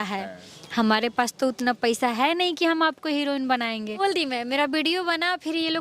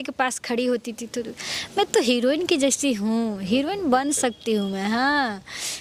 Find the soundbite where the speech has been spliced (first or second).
first